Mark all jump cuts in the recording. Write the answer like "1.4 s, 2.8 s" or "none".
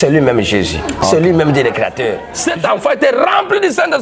2.3 s